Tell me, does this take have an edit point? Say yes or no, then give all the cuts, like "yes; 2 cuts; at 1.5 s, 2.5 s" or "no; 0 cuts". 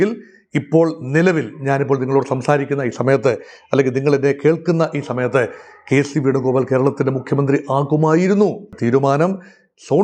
yes; 1 cut; at 8.7 s